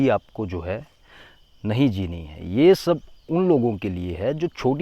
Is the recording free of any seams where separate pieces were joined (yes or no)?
yes